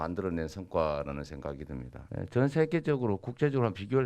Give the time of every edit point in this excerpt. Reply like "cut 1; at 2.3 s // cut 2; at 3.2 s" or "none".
cut 1; at 2.0 s